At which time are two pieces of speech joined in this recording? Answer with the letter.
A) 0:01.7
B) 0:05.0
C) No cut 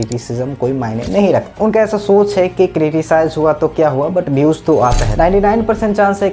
B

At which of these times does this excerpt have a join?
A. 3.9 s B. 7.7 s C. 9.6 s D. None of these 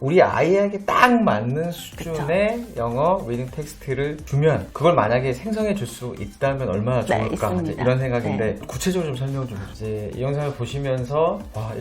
C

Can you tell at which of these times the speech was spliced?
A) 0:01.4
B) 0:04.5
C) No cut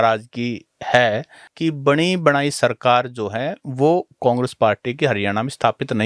A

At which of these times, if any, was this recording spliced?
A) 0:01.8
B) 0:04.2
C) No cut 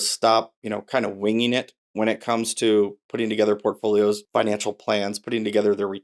B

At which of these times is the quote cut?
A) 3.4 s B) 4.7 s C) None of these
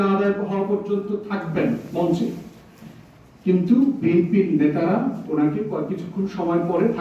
C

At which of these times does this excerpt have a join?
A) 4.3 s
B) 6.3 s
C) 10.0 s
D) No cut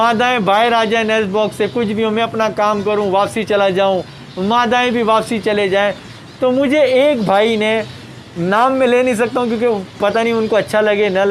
D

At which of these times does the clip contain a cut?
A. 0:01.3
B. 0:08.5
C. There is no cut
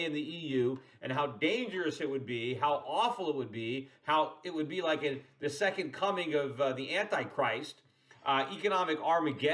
A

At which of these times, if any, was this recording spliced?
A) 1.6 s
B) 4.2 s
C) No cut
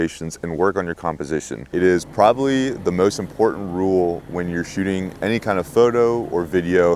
A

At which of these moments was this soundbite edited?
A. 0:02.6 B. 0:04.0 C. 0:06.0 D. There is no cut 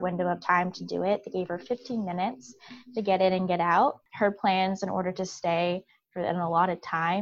B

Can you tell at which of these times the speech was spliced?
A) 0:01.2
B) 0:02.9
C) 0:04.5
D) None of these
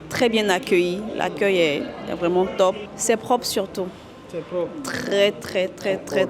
D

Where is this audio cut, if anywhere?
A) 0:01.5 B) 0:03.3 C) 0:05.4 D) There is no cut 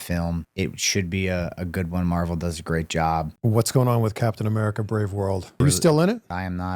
B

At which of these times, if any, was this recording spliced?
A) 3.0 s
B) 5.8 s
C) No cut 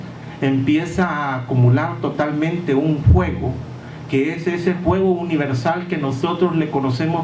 C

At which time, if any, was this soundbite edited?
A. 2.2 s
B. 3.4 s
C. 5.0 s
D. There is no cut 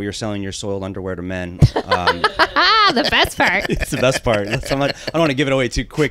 D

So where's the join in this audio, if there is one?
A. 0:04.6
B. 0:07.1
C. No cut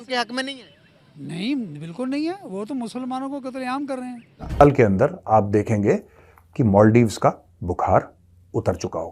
A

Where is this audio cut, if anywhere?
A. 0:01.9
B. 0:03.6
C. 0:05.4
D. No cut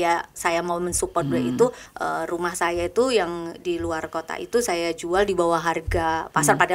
A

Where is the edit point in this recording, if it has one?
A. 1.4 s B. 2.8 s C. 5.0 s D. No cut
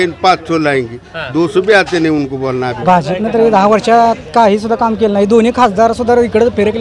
B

